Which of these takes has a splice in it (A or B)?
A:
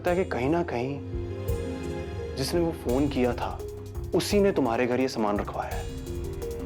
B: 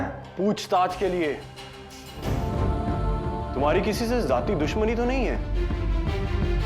B